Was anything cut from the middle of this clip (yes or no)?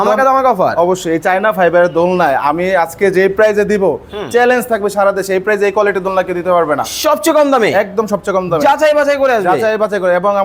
no